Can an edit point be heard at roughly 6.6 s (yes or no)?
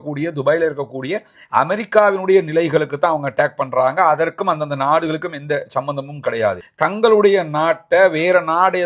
yes